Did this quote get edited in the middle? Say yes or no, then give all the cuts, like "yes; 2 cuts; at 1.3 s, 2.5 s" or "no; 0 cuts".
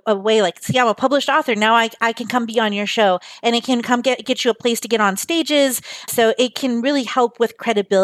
no; 0 cuts